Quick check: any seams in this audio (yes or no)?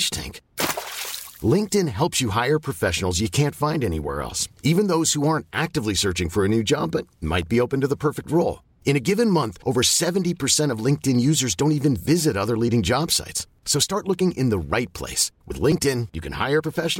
no